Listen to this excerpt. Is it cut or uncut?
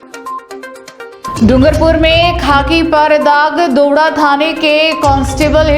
cut